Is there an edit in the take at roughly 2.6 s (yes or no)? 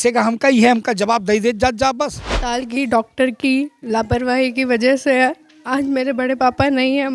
yes